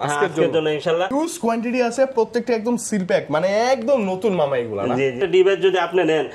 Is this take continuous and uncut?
no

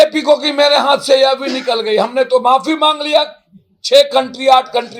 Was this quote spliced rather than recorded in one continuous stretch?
no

